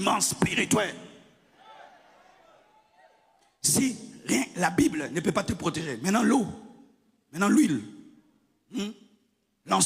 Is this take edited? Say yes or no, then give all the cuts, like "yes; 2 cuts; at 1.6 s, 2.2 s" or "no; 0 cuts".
yes; 1 cut; at 3.3 s